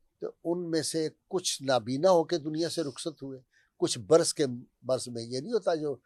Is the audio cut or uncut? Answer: uncut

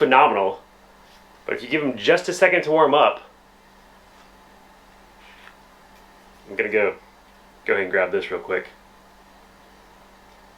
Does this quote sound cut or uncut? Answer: uncut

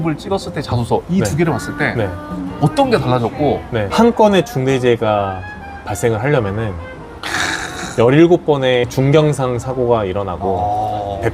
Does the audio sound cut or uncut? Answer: cut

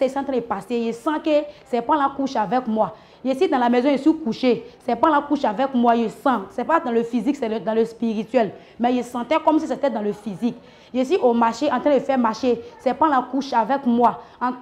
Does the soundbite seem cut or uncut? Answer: uncut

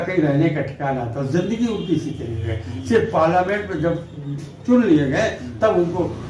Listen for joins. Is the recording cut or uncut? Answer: uncut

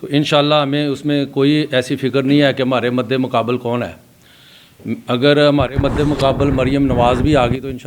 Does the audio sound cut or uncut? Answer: uncut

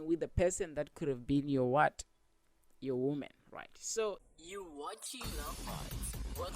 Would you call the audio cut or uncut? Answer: cut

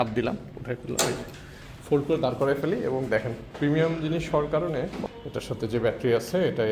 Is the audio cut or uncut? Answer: cut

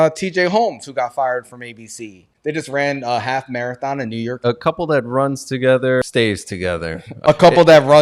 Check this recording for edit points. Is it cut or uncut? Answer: cut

